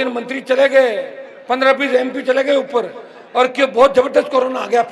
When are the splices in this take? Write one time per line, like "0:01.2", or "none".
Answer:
none

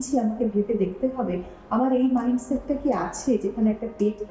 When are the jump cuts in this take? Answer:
none

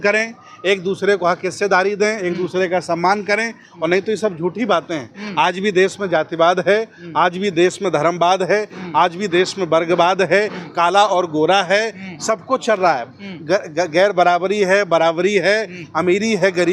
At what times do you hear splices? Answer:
none

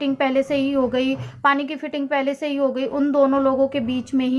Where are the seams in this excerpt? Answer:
none

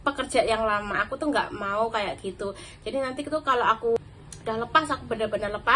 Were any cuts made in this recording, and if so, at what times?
0:04.0

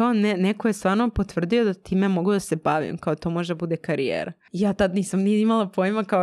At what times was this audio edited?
0:04.4

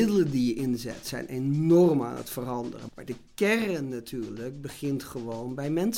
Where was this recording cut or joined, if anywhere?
0:02.8

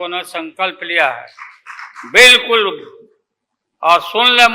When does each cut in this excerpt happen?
none

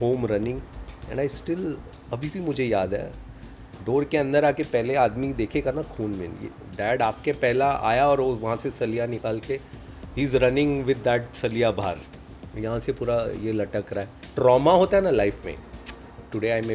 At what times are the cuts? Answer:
0:14.2

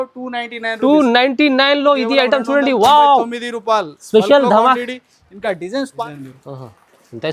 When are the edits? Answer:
0:06.1

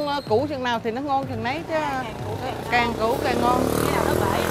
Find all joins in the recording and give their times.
none

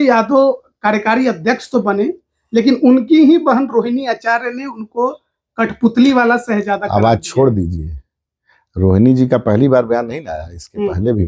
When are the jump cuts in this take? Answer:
none

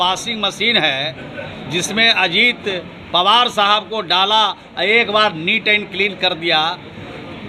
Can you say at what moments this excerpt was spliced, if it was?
none

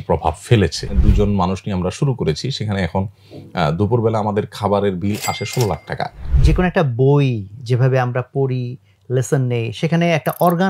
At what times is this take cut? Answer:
0:00.9
0:06.3

